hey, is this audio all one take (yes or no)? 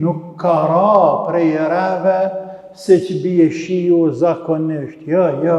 yes